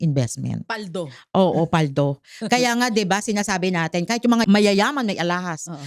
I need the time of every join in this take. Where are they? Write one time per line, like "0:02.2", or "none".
0:04.4